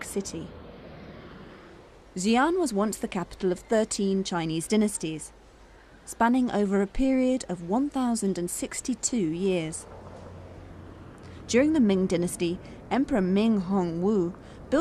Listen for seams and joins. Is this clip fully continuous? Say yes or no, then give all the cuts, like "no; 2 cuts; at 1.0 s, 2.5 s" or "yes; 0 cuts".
yes; 0 cuts